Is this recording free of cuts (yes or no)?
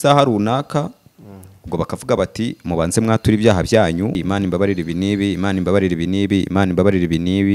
no